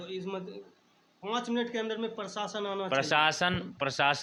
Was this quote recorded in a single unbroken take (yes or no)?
yes